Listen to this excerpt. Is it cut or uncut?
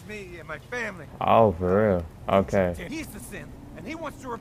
cut